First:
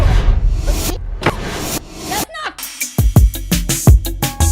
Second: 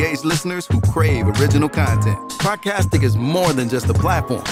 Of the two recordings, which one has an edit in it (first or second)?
first